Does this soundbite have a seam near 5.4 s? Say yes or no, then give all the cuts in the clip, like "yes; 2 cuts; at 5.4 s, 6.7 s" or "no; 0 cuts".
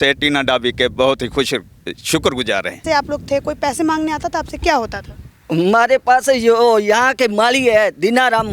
no; 1 cut; at 2.8 s